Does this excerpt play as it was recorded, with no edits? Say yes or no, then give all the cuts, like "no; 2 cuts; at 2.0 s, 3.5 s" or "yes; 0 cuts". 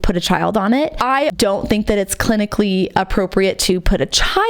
no; 1 cut; at 1.4 s